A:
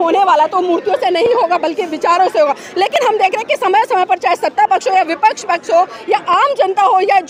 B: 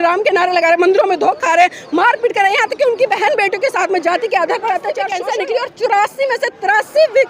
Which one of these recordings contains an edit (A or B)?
B